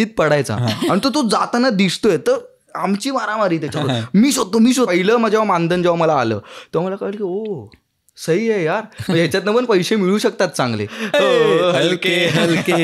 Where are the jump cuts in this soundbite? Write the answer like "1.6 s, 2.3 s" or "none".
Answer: 4.9 s, 10.9 s

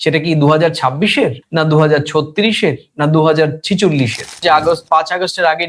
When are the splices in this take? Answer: 4.4 s

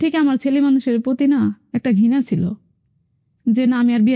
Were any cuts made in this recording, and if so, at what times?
none

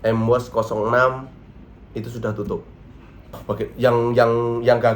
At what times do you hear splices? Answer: 3.3 s

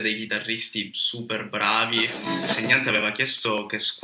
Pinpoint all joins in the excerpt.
2.5 s

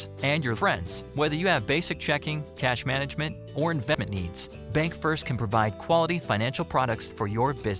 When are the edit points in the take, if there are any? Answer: 4.0 s

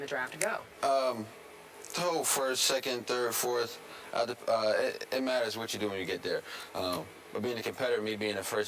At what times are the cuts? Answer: none

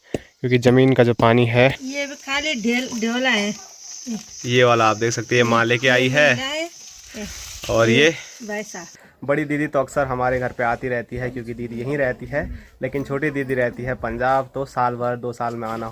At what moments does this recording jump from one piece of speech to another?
1.8 s, 8.9 s

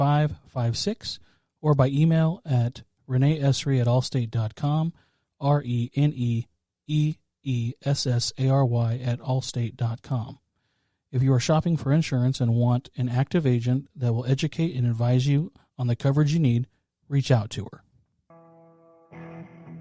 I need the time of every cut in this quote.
18.3 s

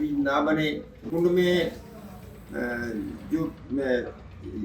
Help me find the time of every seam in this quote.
1.1 s

